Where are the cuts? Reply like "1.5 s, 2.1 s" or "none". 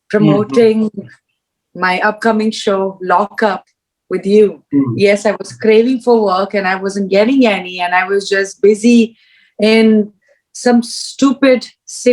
4.6 s